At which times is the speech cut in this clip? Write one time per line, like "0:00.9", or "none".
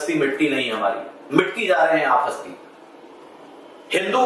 none

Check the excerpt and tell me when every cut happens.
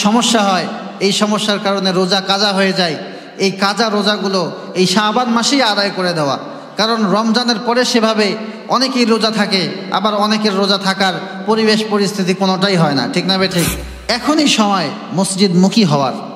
0:13.9

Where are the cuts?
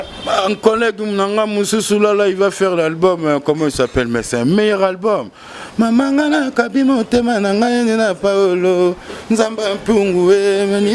none

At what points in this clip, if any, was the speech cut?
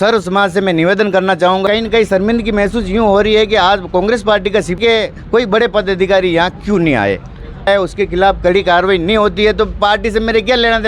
0:01.6
0:04.8
0:07.7

